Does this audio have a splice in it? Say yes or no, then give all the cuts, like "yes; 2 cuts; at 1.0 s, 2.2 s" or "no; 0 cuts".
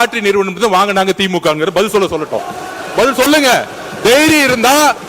no; 0 cuts